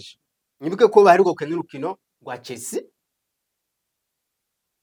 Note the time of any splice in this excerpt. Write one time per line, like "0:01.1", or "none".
none